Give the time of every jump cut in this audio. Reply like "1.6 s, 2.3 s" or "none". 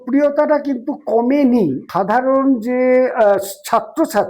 1.8 s

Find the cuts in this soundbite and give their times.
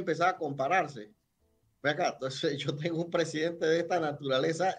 none

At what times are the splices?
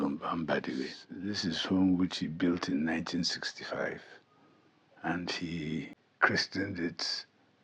1.0 s, 6.0 s

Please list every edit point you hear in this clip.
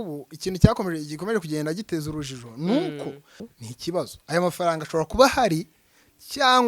3.4 s

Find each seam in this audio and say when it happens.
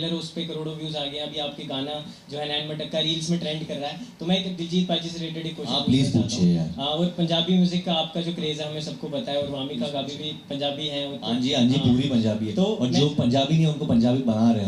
none

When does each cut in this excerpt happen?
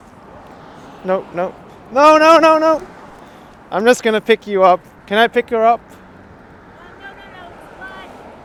none

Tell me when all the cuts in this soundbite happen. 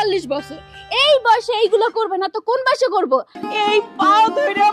3.4 s

